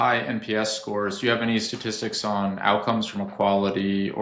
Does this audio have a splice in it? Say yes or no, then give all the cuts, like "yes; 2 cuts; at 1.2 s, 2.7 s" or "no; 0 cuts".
no; 0 cuts